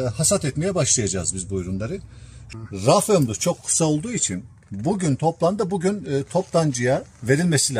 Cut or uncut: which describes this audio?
cut